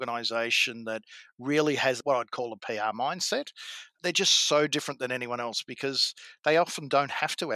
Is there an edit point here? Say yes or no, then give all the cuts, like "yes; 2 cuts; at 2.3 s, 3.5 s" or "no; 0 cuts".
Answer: yes; 1 cut; at 2.0 s